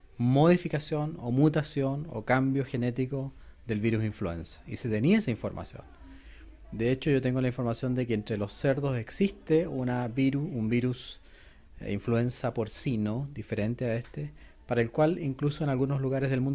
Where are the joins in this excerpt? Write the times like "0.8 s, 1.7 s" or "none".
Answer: 13.0 s